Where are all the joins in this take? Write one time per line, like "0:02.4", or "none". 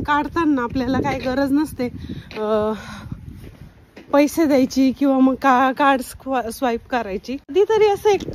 0:07.4